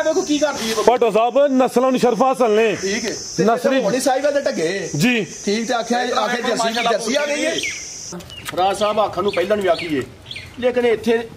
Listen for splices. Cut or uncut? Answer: cut